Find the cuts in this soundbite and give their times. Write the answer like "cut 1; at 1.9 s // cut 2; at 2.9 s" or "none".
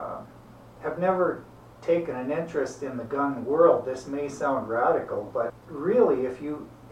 cut 1; at 5.6 s

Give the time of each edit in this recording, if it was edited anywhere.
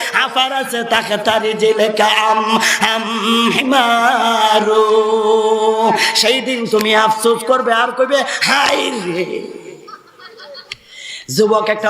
cut 1; at 10.7 s

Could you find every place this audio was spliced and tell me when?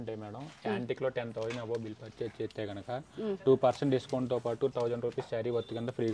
none

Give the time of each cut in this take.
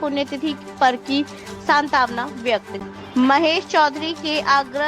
cut 1; at 2.8 s

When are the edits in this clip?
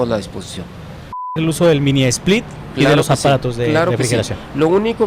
cut 1; at 1.4 s

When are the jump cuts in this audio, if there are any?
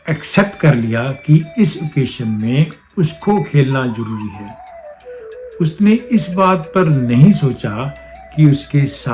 none

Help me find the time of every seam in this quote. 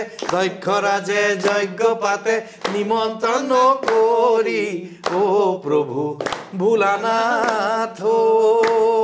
none

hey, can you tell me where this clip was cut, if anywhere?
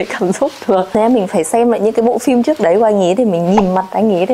cut 1; at 0.9 s

